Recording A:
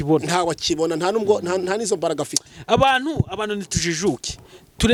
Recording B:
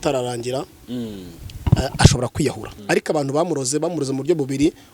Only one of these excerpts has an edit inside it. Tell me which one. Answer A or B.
B